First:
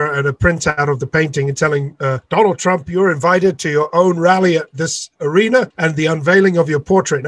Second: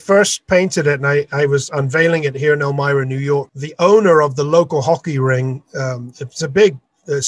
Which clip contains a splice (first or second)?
first